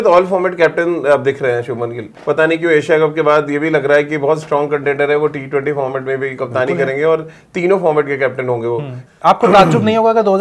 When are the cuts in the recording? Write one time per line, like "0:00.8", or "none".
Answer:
0:02.1
0:09.1